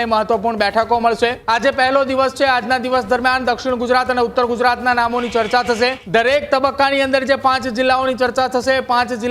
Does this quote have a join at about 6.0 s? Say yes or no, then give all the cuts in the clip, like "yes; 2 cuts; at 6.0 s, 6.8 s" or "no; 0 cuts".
yes; 2 cuts; at 1.4 s, 6.0 s